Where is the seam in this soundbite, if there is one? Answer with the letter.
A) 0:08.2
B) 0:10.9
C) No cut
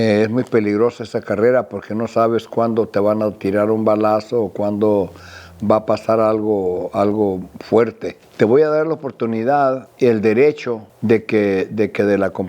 A